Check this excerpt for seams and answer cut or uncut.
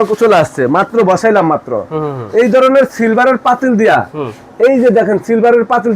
uncut